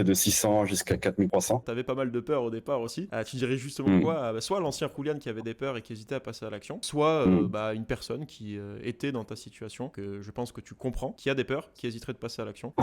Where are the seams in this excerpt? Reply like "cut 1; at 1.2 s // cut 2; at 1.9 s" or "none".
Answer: cut 1; at 1.4 s // cut 2; at 6.8 s // cut 3; at 9.9 s // cut 4; at 11.2 s

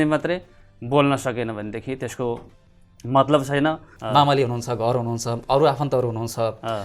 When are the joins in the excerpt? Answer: cut 1; at 3.9 s

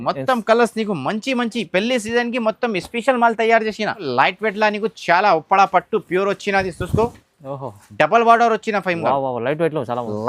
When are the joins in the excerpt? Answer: cut 1; at 4.1 s

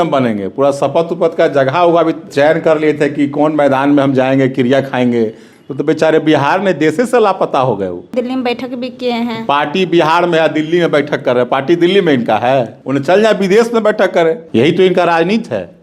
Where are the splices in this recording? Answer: cut 1; at 2.3 s // cut 2; at 8.1 s // cut 3; at 12.8 s // cut 4; at 14.4 s

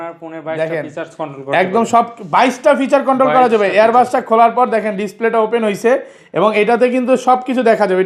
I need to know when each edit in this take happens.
none

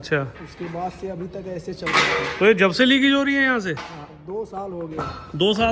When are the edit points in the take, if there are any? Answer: none

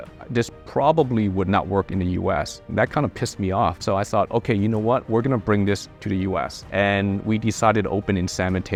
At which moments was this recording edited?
none

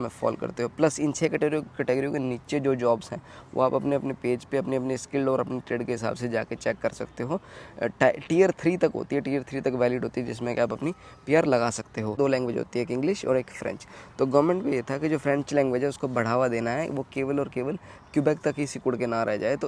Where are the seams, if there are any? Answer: cut 1; at 12.2 s

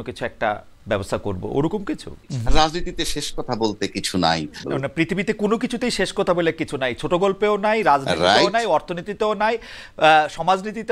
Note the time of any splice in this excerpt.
cut 1; at 2.3 s // cut 2; at 4.6 s

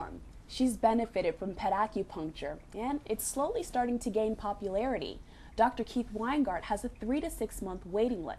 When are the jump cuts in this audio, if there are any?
none

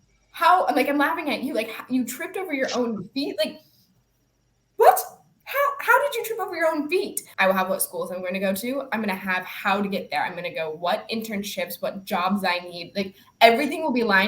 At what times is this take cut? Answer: cut 1; at 7.2 s

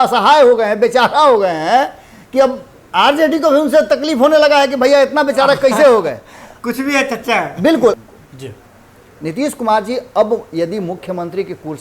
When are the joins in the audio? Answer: cut 1; at 8.0 s

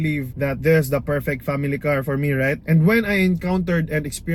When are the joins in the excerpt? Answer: none

